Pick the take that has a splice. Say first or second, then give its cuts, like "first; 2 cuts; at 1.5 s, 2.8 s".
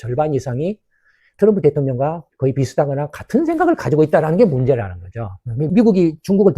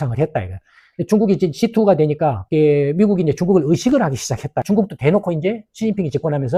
first; 1 cut; at 5.6 s